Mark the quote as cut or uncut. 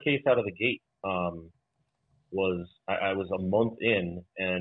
uncut